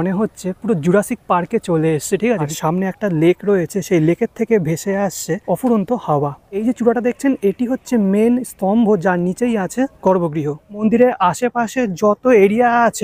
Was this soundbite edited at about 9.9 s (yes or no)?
yes